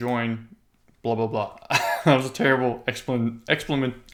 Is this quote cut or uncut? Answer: uncut